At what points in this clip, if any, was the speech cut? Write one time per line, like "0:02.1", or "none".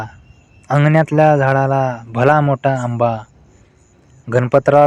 none